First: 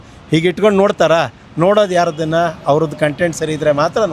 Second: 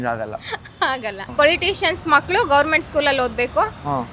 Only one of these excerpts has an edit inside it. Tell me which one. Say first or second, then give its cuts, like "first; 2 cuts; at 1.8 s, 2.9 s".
second; 1 cut; at 1.1 s